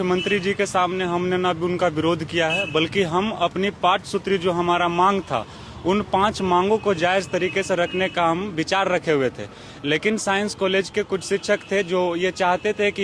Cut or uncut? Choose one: uncut